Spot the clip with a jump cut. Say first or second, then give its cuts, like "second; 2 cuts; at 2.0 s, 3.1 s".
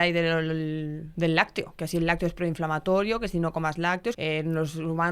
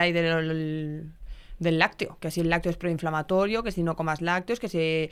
first; 2 cuts; at 1.0 s, 4.2 s